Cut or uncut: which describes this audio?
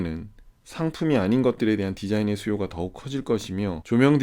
uncut